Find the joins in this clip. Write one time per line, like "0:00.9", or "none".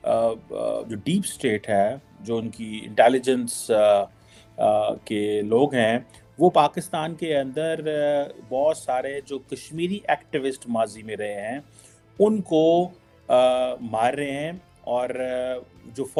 none